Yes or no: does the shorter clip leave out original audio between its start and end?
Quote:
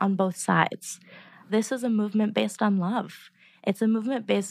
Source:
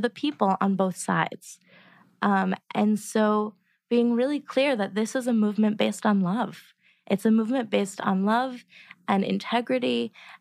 yes